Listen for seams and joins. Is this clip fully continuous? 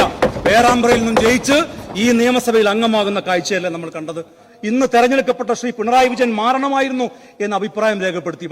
no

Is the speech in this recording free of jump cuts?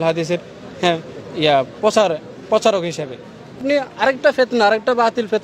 no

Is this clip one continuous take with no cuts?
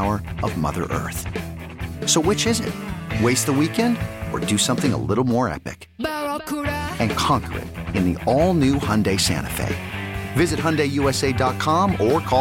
yes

